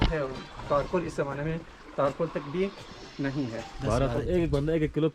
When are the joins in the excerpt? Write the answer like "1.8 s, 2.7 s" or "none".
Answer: 3.7 s

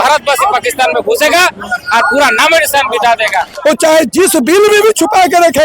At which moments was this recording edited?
3.5 s

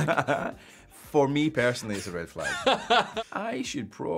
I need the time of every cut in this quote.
3.1 s

